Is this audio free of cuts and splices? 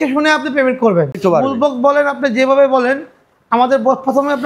no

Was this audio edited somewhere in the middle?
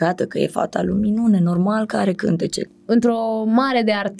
yes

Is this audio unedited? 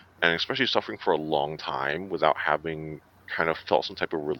yes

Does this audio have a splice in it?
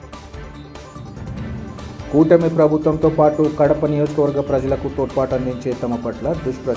no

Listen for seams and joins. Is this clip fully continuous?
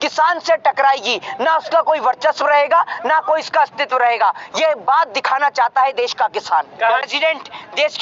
no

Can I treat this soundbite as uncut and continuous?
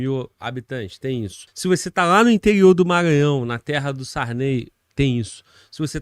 no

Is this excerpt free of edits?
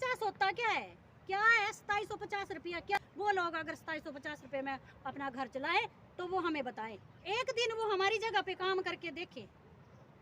no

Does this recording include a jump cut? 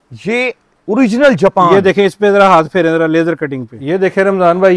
yes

